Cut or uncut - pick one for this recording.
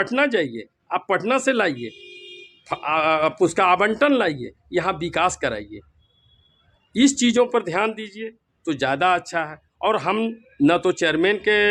uncut